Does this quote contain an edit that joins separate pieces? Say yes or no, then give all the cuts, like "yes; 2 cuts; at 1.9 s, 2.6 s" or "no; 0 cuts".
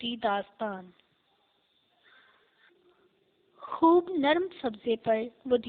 yes; 1 cut; at 3.0 s